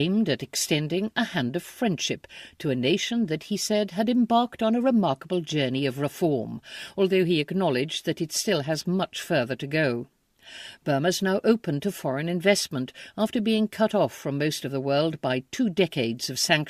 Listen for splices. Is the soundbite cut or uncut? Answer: cut